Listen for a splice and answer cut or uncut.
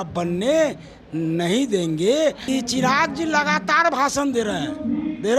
cut